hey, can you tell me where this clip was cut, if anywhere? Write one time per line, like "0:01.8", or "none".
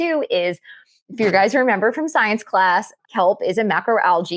0:03.0